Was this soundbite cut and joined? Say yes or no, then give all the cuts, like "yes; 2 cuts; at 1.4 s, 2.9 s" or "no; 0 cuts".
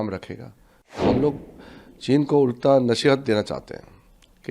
yes; 1 cut; at 1.0 s